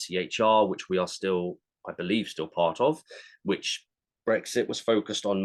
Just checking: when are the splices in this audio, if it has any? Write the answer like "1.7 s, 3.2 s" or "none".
none